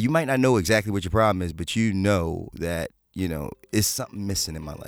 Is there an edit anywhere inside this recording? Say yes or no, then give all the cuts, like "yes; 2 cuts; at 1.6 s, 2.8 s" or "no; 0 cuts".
no; 0 cuts